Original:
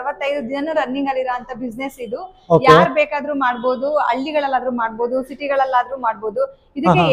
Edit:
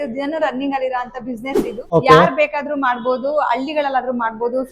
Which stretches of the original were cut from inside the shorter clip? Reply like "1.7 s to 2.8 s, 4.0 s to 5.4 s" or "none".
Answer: 2.1 s to 2.3 s